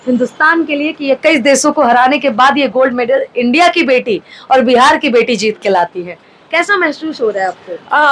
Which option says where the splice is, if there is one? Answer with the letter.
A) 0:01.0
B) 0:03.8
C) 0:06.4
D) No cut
D